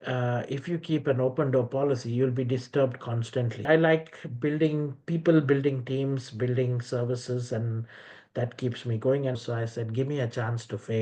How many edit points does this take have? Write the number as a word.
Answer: two